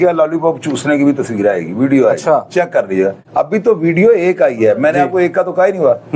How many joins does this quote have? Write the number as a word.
one